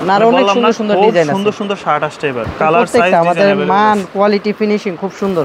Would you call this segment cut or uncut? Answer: cut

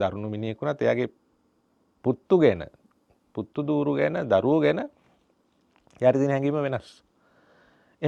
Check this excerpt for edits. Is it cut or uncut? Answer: uncut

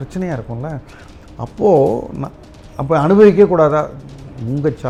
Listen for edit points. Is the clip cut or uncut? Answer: uncut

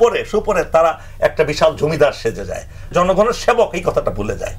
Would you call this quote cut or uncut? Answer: cut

